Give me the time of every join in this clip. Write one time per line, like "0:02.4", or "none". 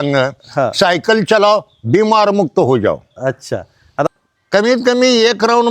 0:04.1